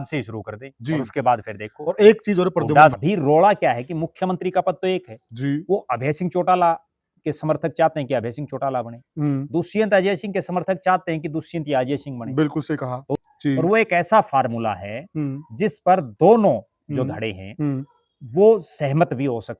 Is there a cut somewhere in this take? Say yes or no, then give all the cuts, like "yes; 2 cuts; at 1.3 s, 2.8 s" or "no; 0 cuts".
yes; 2 cuts; at 2.9 s, 13.2 s